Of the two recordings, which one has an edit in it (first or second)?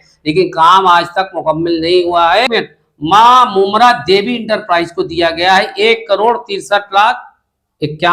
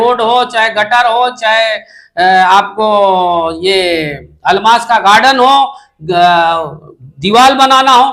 first